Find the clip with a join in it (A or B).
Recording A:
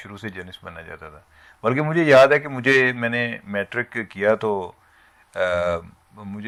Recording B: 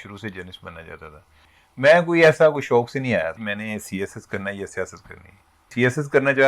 B